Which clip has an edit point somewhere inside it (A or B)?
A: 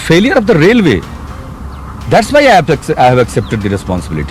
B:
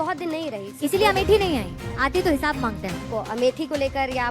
B